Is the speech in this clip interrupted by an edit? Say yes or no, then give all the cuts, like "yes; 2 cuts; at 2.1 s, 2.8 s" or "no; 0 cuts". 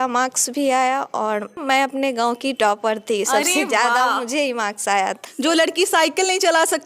yes; 2 cuts; at 1.6 s, 5.2 s